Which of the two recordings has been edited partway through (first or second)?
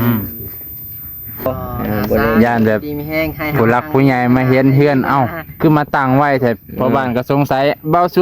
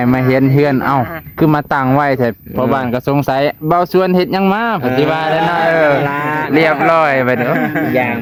first